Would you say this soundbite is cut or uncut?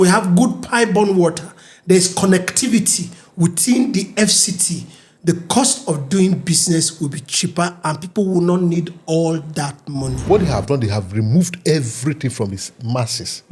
cut